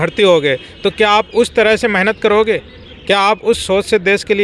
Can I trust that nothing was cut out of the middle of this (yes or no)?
yes